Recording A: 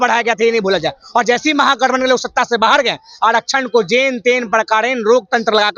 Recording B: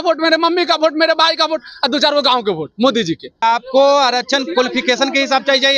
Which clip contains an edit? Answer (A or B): B